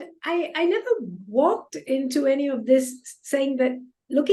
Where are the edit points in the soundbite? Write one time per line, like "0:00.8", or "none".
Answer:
none